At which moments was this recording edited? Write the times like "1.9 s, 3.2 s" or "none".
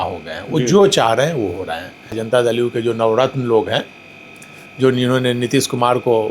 2.2 s